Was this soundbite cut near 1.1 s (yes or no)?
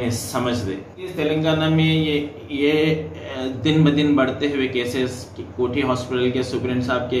yes